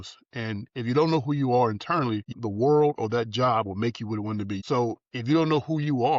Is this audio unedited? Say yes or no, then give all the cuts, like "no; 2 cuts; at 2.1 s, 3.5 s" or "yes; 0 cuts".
no; 2 cuts; at 2.2 s, 4.6 s